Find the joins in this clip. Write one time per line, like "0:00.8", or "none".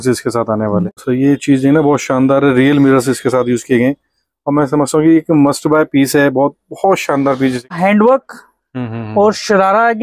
0:00.8
0:07.7